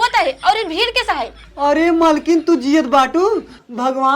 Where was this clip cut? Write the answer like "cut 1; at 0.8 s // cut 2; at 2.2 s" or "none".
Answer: cut 1; at 1.4 s

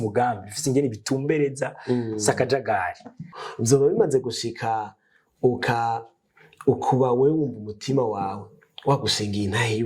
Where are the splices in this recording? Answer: cut 1; at 3.3 s

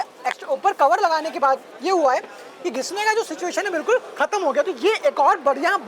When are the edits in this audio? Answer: none

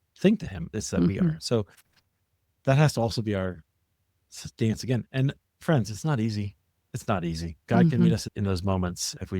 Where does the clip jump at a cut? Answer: cut 1; at 7.6 s

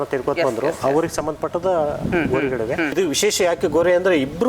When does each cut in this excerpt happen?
cut 1; at 2.9 s

